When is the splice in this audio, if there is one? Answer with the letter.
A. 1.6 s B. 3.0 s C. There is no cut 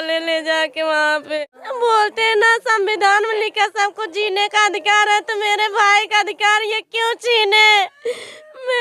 A